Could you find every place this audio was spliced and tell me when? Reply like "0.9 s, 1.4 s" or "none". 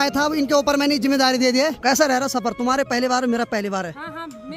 1.8 s